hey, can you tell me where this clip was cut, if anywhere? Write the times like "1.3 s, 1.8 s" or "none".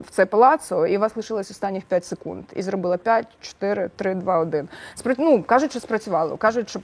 none